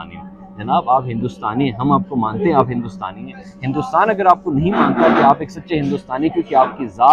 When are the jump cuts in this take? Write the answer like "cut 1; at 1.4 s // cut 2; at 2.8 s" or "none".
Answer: none